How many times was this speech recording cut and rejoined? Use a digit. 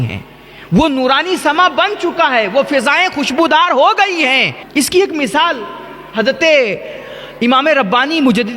1